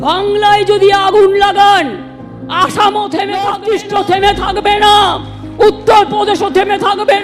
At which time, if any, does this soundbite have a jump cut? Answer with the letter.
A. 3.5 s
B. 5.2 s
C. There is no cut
A